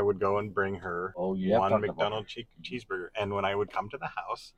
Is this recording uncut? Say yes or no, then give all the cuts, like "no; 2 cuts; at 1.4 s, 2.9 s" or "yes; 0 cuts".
no; 1 cut; at 1.0 s